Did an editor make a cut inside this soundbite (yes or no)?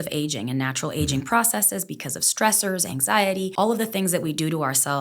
yes